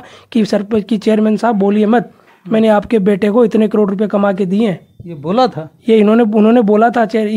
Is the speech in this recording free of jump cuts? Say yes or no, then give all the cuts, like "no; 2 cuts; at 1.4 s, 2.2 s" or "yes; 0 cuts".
yes; 0 cuts